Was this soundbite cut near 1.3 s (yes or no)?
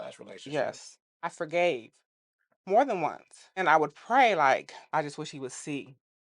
yes